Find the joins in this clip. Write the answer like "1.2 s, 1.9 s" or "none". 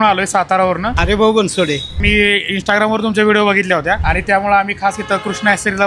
0.9 s, 1.9 s